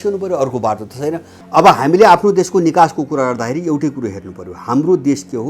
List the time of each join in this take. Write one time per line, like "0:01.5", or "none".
0:01.3